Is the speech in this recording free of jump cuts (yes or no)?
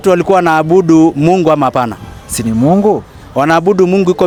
yes